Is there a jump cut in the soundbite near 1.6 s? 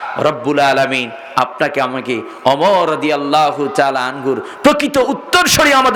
no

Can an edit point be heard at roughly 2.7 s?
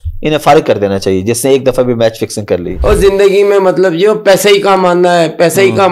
yes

